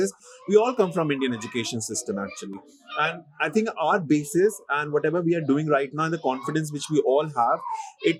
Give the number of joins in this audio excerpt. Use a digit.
0